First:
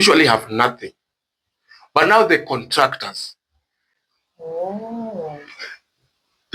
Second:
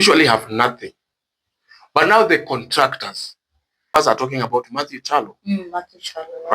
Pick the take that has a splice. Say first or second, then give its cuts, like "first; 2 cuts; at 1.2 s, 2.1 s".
second; 1 cut; at 3.9 s